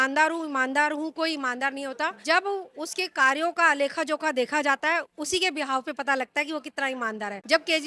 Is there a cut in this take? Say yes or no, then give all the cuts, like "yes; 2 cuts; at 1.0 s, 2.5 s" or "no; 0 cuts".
no; 0 cuts